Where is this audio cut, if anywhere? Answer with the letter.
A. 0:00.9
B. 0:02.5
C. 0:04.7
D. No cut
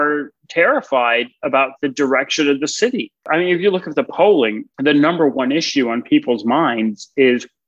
D